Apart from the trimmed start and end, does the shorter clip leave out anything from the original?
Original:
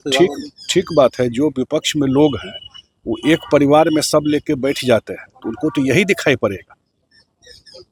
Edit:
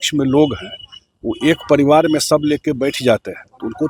no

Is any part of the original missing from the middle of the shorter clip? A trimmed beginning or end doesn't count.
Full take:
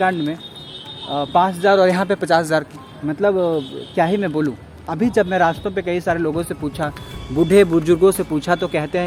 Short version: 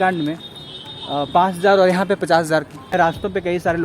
yes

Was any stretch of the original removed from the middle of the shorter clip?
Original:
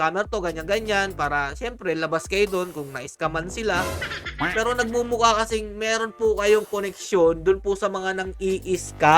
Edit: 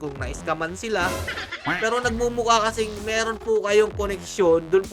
no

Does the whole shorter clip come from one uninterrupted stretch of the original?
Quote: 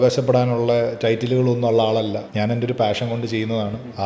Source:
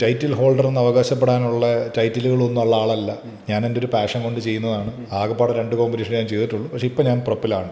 no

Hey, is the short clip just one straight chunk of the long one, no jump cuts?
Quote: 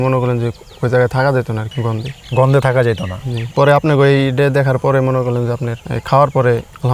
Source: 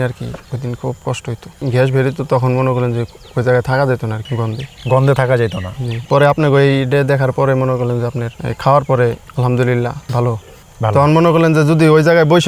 yes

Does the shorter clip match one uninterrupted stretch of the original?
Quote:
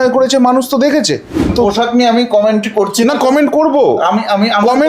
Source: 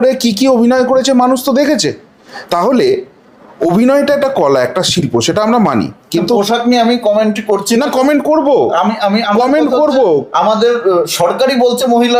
no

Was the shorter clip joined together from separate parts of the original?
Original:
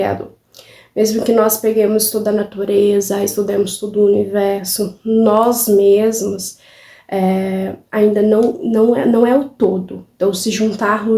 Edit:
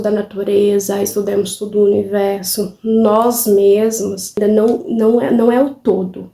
yes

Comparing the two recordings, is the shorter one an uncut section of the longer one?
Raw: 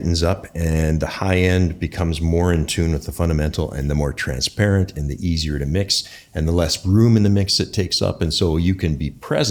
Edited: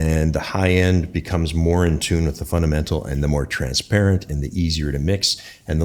yes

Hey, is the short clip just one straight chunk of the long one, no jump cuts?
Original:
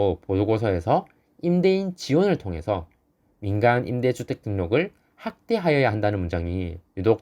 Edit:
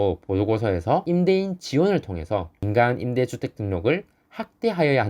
no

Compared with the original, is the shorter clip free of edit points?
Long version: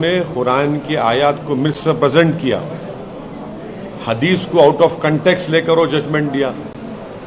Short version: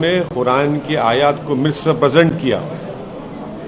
yes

